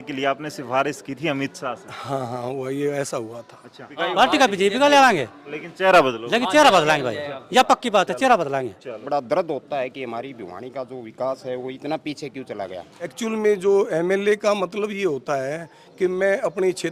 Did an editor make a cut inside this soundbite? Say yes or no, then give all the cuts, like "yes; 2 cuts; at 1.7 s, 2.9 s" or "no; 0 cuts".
yes; 3 cuts; at 3.9 s, 9.0 s, 13.1 s